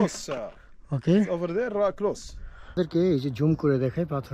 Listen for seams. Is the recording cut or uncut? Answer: cut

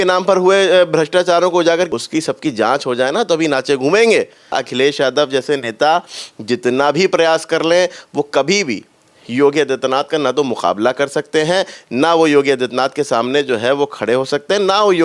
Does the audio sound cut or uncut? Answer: cut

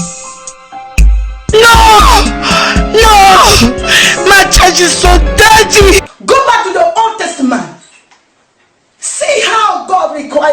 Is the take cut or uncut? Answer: cut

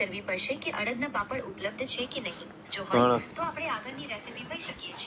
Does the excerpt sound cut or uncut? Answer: uncut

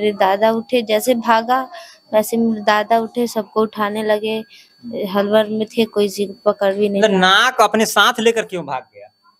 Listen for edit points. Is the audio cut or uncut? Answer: uncut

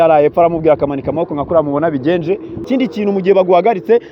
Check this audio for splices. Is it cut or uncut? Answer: cut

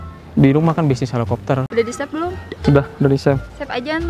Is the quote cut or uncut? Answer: cut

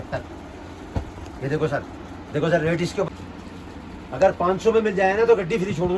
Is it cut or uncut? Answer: cut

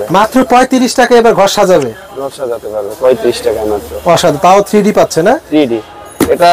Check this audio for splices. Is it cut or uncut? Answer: uncut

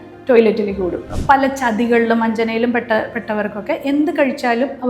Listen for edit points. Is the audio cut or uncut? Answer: cut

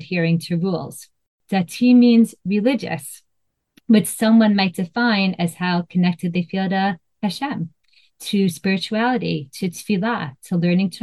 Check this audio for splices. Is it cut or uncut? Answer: uncut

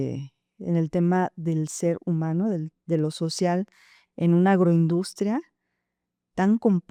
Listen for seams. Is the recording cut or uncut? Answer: uncut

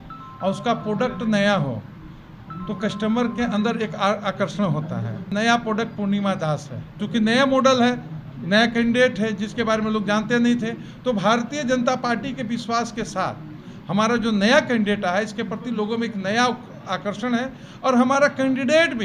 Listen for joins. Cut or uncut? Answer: cut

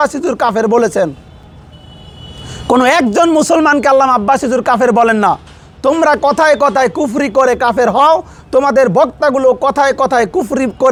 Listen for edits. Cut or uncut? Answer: uncut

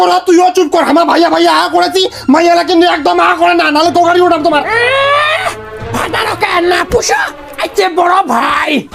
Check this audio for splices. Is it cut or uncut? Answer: uncut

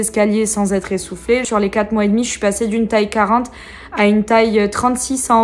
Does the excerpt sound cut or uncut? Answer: cut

